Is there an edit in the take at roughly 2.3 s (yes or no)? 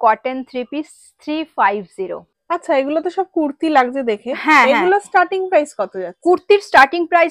yes